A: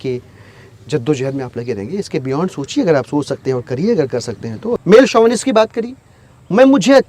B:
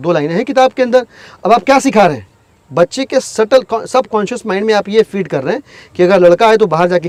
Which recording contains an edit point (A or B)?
A